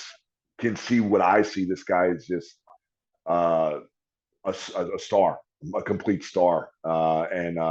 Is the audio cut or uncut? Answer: uncut